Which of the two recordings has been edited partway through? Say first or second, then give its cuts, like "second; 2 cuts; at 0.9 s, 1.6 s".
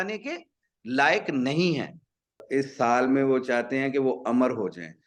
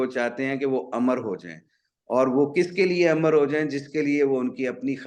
first; 1 cut; at 2.4 s